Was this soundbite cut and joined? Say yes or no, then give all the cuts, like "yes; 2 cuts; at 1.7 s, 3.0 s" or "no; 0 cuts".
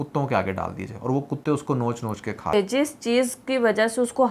yes; 1 cut; at 2.5 s